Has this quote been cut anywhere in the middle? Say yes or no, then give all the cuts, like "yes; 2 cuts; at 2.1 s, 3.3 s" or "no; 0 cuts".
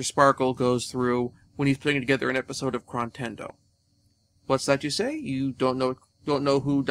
no; 0 cuts